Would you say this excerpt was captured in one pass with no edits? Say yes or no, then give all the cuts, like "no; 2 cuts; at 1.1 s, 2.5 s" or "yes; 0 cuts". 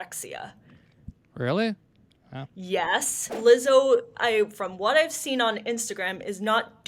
no; 1 cut; at 3.3 s